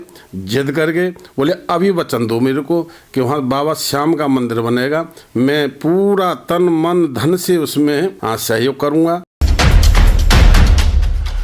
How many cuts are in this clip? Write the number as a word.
one